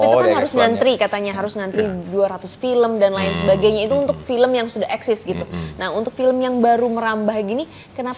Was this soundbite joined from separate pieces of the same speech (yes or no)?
no